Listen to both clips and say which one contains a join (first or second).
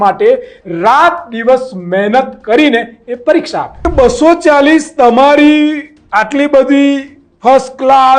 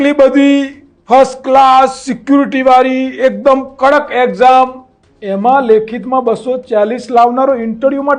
first